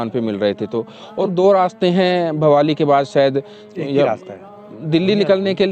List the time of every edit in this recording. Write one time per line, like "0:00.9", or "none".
0:01.3